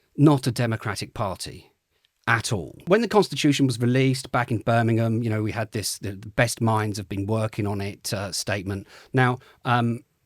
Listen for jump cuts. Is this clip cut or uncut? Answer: cut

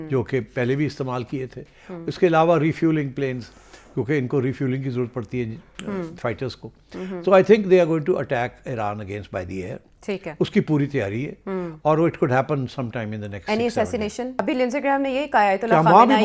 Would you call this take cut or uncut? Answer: cut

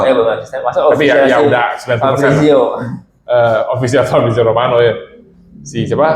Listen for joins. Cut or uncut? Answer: uncut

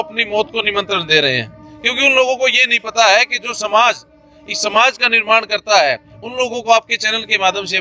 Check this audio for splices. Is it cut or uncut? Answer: uncut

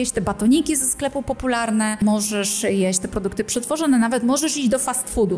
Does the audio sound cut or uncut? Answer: cut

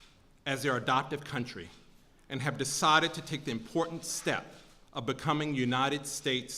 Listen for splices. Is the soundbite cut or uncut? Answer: cut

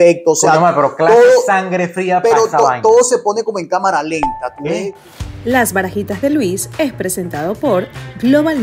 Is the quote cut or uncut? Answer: cut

